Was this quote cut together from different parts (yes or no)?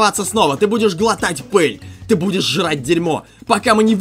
no